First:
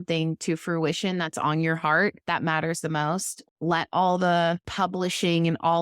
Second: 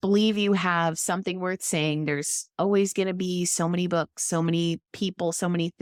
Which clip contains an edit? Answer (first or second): first